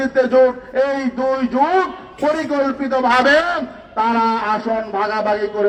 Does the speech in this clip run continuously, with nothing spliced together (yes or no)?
yes